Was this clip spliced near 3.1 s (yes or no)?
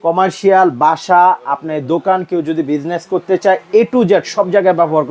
no